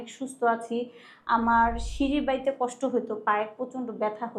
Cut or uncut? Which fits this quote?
uncut